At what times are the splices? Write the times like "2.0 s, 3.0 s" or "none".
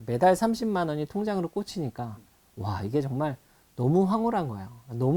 none